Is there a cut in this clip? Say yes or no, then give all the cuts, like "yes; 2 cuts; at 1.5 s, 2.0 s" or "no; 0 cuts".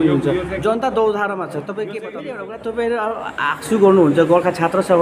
yes; 1 cut; at 2.0 s